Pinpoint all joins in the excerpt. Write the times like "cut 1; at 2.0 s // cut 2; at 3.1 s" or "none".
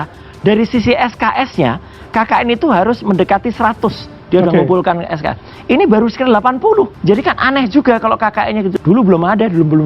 cut 1; at 6.9 s // cut 2; at 8.7 s